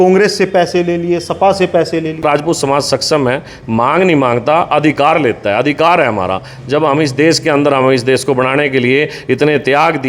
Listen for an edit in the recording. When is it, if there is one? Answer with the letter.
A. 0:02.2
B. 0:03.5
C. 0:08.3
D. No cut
A